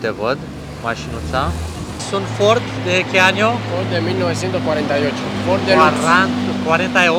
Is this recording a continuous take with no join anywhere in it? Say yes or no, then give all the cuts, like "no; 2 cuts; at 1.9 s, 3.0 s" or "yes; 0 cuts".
yes; 0 cuts